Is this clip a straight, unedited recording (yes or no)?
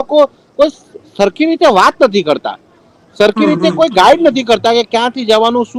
yes